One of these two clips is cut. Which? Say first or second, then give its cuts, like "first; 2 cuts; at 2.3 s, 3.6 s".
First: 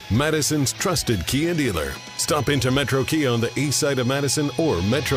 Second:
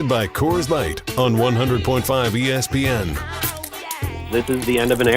second; 1 cut; at 4.2 s